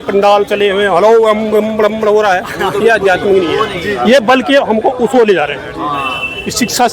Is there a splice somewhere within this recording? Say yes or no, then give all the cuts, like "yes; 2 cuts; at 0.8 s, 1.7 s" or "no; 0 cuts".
no; 0 cuts